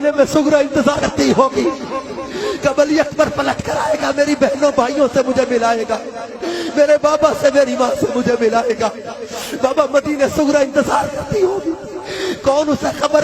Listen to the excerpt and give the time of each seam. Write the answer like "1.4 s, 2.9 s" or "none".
1.0 s

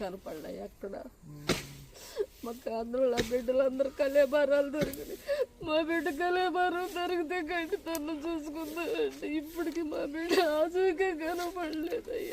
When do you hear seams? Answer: 6.7 s

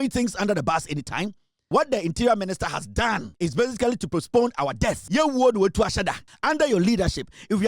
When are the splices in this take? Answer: 1.6 s, 3.3 s, 5.0 s, 6.3 s

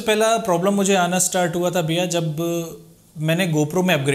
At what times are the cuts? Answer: none

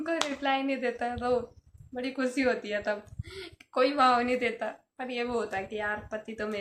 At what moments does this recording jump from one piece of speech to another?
none

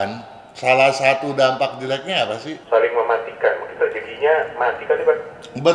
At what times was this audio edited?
2.5 s

